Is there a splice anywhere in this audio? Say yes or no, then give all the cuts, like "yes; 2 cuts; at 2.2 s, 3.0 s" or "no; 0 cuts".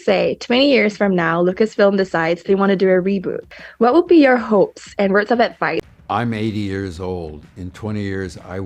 yes; 2 cuts; at 3.4 s, 5.9 s